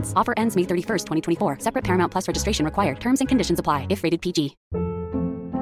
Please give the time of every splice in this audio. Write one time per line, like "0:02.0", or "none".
0:04.6